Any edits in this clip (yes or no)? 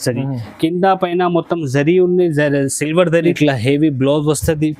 yes